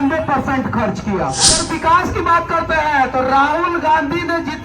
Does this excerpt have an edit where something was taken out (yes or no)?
yes